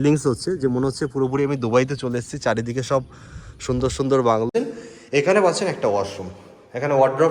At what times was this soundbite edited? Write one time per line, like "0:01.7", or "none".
0:04.5